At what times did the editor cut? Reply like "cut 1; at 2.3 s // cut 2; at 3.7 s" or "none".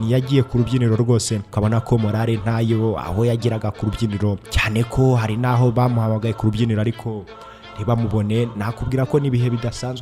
cut 1; at 1.4 s // cut 2; at 4.5 s